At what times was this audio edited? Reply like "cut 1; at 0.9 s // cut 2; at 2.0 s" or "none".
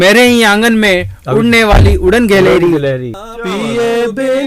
cut 1; at 3.1 s